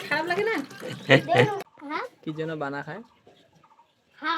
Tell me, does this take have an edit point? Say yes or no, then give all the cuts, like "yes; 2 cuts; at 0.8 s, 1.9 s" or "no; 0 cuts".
yes; 1 cut; at 1.6 s